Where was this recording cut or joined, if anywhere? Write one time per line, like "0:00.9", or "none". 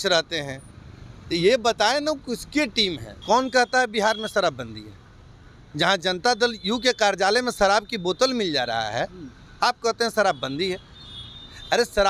0:03.1